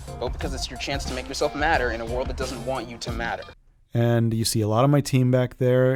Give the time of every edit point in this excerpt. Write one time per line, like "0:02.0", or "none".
none